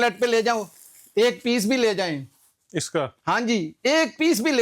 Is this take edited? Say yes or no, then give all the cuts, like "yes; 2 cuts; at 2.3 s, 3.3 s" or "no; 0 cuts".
no; 0 cuts